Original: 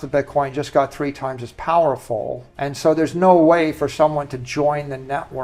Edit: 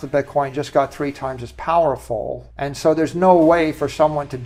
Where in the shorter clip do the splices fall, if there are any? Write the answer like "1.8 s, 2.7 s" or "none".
none